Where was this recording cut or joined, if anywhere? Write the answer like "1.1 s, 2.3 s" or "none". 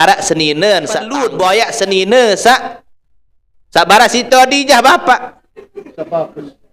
1.2 s